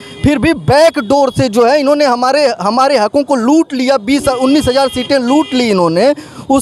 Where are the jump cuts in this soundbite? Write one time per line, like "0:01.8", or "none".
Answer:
none